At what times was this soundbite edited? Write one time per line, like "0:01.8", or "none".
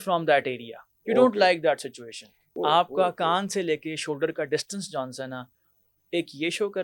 0:02.4